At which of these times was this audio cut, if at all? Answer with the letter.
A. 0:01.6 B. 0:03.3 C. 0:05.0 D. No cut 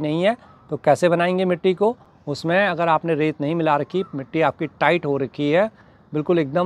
D